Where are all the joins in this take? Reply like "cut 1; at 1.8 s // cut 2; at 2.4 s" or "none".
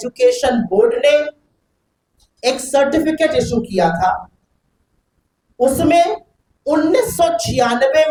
none